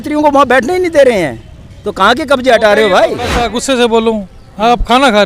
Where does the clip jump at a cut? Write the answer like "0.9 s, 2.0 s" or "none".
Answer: 3.5 s